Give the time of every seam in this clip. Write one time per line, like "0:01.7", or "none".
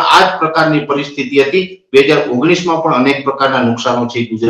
none